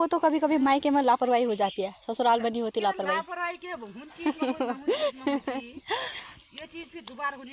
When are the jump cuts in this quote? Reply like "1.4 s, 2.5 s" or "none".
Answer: none